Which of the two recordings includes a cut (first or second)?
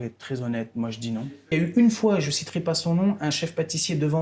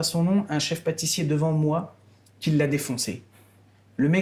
first